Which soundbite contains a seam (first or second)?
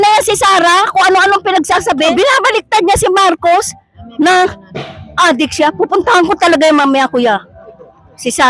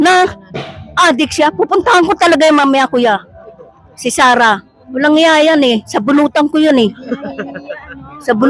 first